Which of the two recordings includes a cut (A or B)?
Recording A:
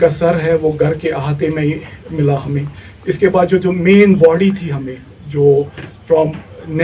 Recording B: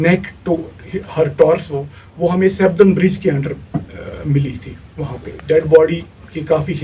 B